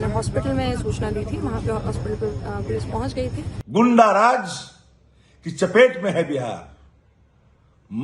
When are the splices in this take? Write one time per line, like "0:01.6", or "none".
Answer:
0:03.5